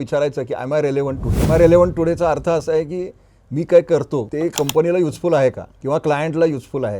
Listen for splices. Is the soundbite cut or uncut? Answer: cut